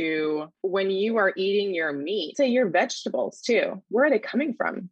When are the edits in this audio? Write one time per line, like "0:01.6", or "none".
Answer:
0:02.3